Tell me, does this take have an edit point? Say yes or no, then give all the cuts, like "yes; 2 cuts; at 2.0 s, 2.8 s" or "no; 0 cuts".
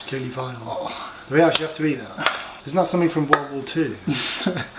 no; 0 cuts